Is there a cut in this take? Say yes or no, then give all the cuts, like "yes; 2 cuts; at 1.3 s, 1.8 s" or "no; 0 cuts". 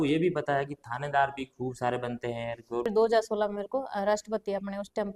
yes; 1 cut; at 2.9 s